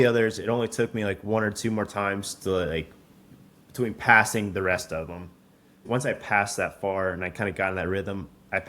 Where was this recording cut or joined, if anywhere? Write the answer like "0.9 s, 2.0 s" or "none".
5.8 s